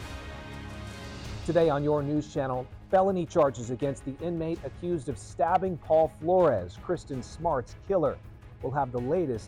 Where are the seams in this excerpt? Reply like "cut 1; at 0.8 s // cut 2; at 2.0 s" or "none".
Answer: cut 1; at 1.4 s